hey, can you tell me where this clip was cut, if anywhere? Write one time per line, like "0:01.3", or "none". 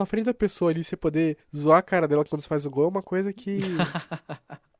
0:01.5
0:03.8